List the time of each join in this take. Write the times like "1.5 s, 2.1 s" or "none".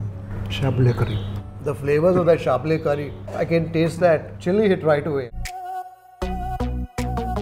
5.7 s